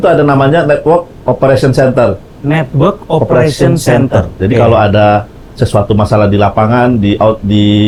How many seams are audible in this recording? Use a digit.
0